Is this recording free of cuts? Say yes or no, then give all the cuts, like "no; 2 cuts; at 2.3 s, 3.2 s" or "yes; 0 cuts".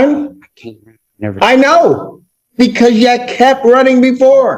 yes; 0 cuts